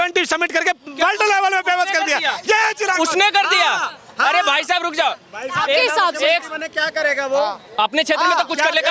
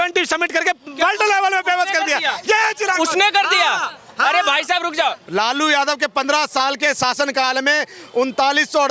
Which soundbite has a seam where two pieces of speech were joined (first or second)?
second